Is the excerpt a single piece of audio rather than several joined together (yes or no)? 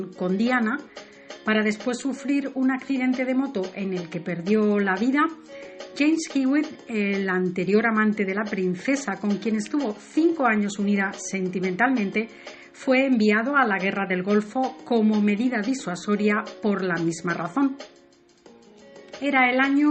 yes